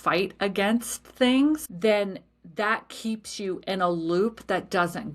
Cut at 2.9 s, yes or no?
no